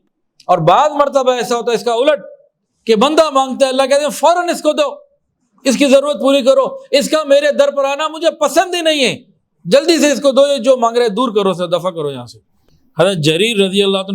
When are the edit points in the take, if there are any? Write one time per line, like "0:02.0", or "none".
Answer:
0:12.6